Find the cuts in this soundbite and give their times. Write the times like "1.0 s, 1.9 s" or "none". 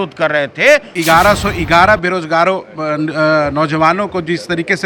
0.9 s